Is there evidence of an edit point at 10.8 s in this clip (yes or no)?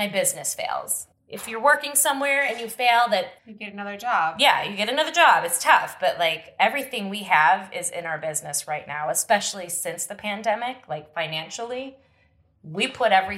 no